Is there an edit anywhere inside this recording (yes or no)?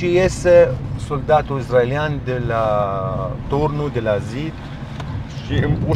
no